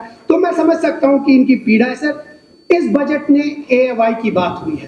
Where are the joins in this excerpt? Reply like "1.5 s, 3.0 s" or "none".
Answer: none